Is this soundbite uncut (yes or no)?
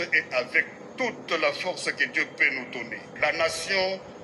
no